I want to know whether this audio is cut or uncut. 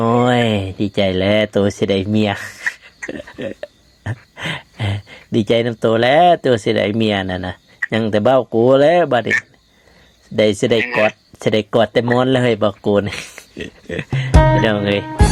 uncut